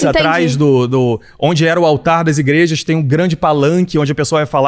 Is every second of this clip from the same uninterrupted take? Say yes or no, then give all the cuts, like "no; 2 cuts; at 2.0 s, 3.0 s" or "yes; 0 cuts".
yes; 0 cuts